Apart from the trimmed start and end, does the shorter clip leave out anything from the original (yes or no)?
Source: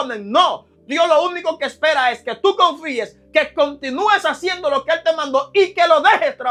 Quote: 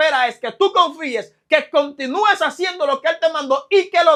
no